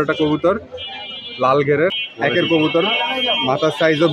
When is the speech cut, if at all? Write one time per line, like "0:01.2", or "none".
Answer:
0:02.0